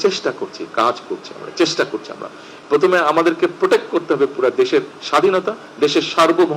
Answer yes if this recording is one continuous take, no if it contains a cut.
no